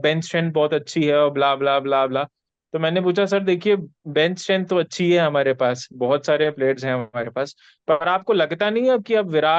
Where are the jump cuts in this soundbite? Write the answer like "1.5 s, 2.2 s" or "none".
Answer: none